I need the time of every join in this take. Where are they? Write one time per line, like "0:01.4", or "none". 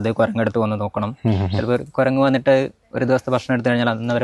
none